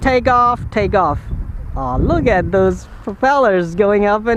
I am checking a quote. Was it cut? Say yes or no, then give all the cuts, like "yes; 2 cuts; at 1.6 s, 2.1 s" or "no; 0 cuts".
no; 0 cuts